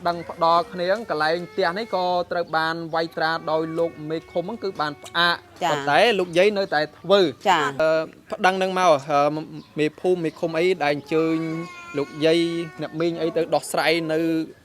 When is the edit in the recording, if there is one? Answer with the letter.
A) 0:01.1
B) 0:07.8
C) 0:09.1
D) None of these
B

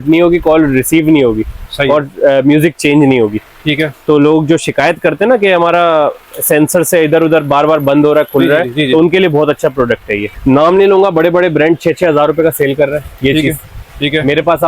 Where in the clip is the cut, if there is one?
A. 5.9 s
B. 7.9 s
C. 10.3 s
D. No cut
C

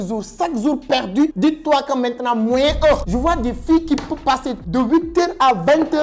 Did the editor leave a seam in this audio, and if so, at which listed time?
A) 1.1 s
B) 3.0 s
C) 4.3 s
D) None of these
B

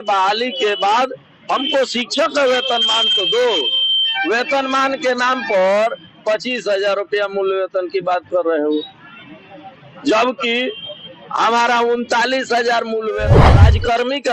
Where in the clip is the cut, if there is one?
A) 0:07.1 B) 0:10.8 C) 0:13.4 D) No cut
C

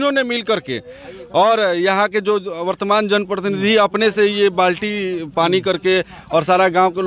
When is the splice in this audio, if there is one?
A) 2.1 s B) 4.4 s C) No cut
C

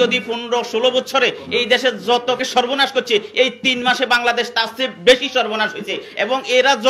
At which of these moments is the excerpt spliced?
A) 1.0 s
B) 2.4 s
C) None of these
B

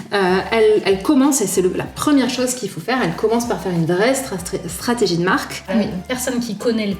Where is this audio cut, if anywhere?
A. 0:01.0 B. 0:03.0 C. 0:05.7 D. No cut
C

